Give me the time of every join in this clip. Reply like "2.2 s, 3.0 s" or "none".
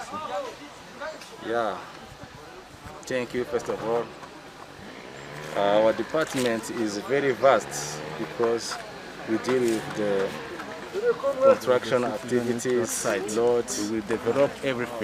13.7 s